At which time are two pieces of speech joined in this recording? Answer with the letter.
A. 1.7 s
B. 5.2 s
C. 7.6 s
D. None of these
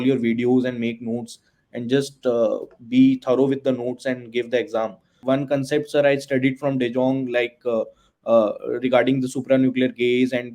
B